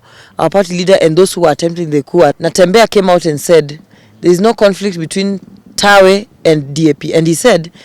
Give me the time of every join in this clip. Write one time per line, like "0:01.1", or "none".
0:02.3